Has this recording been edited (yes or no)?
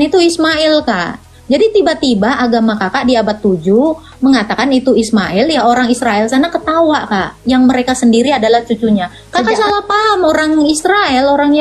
yes